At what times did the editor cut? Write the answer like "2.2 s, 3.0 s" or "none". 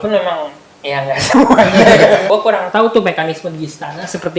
2.2 s